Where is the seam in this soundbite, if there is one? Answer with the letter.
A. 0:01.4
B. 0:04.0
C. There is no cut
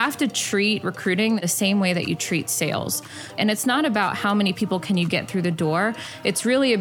A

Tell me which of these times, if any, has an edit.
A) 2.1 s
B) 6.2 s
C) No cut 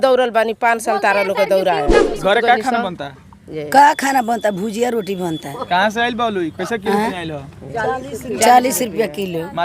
A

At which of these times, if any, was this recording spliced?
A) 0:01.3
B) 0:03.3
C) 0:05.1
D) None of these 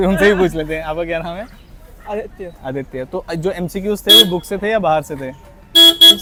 D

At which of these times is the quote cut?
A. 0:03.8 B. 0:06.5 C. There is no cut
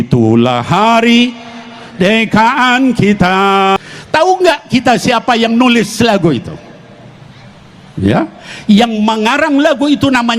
A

